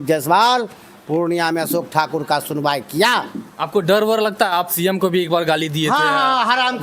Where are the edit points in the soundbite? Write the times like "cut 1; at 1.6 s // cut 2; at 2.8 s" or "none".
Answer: none